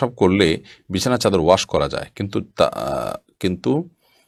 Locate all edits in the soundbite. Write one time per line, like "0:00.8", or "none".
none